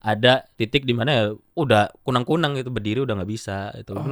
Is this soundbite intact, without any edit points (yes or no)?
no